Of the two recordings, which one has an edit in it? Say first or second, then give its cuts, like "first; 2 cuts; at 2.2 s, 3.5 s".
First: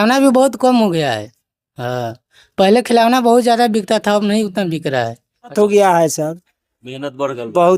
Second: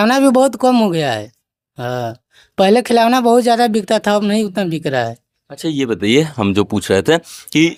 first; 1 cut; at 5.5 s